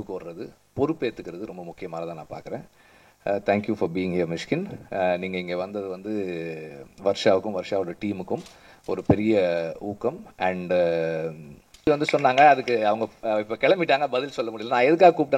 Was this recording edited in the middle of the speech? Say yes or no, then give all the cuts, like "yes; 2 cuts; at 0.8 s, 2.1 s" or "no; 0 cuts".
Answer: yes; 1 cut; at 11.9 s